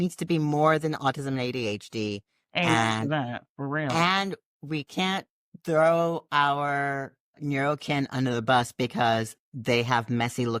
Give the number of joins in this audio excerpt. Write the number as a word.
zero